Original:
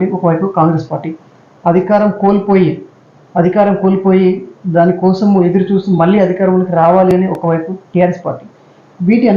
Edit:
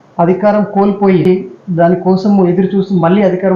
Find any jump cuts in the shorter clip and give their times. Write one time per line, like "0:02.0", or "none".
0:01.2